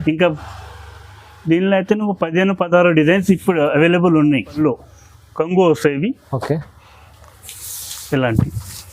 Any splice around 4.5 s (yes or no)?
yes